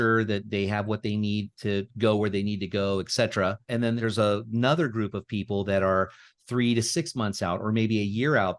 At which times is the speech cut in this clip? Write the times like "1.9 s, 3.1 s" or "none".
4.0 s